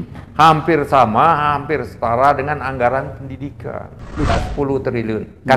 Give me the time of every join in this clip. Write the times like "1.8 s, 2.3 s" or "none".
4.3 s